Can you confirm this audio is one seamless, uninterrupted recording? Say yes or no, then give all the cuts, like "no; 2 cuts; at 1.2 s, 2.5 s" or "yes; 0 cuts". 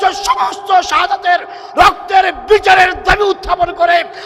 yes; 0 cuts